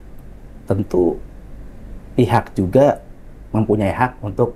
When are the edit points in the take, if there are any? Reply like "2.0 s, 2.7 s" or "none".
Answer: none